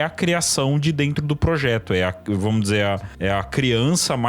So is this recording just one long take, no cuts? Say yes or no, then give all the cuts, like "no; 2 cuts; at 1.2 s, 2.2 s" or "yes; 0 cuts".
no; 1 cut; at 3.1 s